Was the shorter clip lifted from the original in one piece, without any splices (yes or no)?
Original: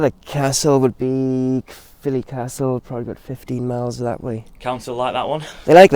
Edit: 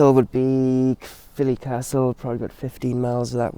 yes